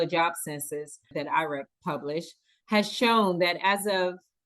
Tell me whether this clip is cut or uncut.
cut